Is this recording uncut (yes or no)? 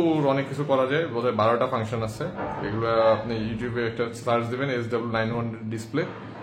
yes